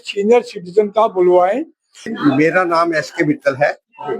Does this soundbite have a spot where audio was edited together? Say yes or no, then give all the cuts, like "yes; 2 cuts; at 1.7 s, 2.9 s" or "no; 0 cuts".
yes; 1 cut; at 2.0 s